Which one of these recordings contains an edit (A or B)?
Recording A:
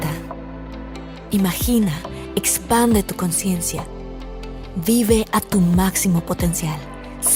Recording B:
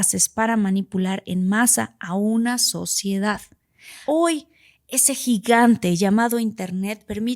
B